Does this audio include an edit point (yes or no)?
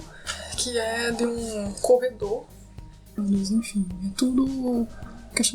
yes